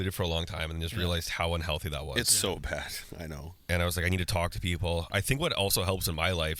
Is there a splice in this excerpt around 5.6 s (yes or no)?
no